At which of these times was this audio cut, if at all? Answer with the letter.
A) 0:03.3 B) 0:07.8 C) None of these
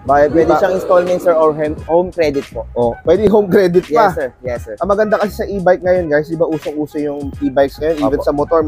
C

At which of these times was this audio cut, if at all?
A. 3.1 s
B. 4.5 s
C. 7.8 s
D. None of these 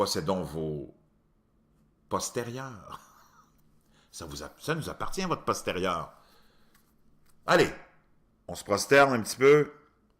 C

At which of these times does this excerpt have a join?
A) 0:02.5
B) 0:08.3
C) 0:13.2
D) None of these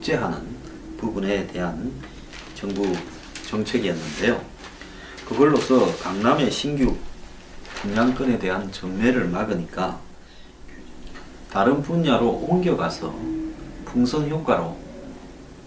C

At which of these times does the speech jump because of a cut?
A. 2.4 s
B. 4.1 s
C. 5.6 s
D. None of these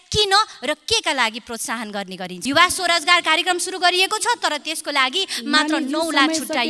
A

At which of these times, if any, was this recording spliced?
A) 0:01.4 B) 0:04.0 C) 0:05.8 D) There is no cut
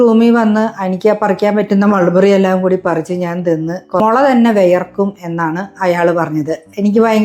B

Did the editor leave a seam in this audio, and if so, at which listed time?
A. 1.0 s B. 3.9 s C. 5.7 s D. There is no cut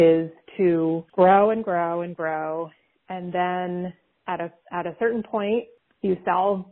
A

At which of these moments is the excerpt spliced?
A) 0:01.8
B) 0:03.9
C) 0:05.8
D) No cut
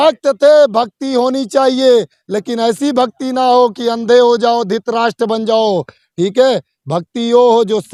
D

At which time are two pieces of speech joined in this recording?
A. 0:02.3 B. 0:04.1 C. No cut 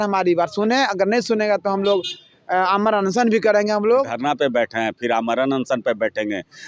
B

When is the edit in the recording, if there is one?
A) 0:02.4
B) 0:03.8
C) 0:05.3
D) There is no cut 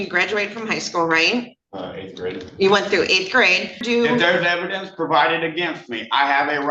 B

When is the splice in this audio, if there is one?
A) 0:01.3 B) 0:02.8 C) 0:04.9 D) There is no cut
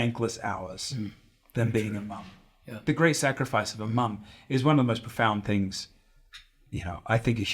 B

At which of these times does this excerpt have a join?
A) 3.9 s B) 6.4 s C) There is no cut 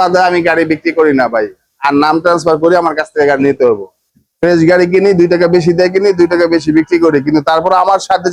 A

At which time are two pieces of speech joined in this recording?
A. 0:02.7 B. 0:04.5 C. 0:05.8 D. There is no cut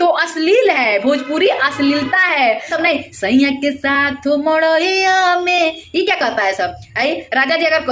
A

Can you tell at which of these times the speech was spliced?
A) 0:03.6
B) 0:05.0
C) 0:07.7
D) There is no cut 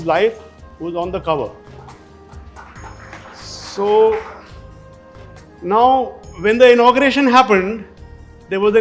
D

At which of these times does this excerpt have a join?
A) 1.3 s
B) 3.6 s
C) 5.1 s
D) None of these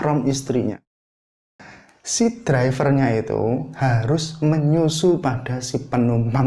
A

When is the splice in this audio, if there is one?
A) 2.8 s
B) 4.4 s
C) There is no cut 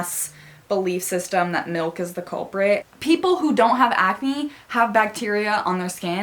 A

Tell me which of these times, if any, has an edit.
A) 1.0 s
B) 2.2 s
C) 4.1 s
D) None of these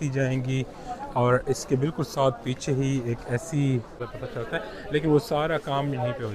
C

